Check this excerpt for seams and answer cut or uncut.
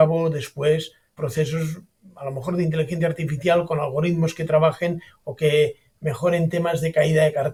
uncut